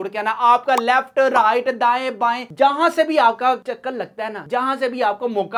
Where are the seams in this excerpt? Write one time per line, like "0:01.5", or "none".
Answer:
none

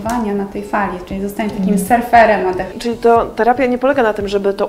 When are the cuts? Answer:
0:02.7

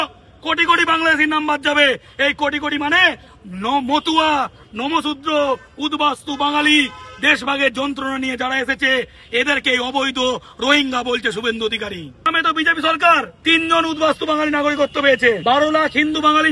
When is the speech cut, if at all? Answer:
0:12.2
0:13.3
0:15.4

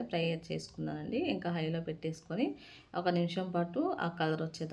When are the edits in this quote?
none

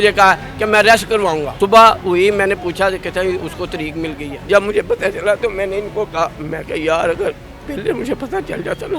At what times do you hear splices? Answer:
0:01.5
0:04.3

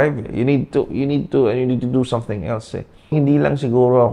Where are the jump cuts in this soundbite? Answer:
0:03.1

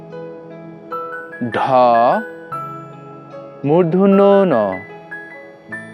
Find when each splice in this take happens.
0:02.2
0:03.6

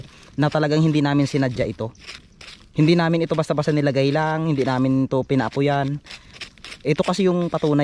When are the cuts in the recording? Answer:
none

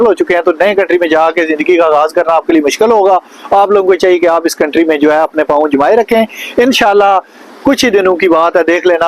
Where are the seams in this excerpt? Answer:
none

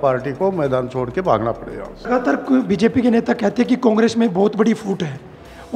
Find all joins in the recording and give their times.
0:01.9

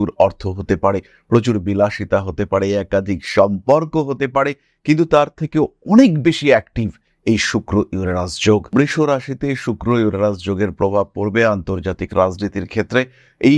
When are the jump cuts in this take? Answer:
none

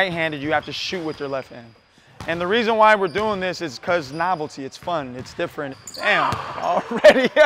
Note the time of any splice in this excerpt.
0:05.7

